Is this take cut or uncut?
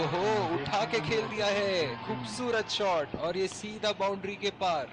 uncut